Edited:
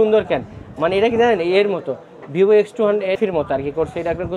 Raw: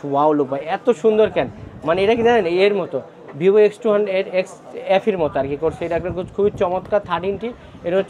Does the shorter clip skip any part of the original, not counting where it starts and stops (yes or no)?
yes